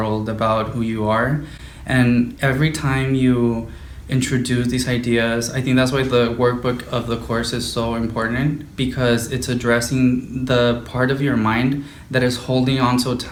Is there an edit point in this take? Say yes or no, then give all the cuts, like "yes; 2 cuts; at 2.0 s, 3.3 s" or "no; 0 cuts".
no; 0 cuts